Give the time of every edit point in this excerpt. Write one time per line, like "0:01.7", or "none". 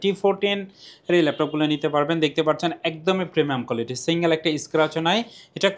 none